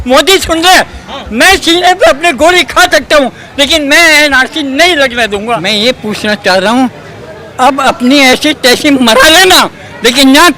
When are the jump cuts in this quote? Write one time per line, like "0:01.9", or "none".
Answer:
0:05.6